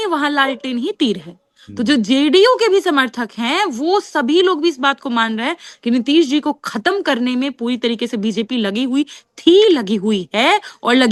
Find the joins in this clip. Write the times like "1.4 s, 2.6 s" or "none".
none